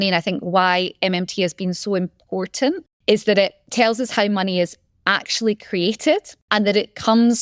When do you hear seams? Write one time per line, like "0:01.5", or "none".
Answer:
0:02.9
0:06.4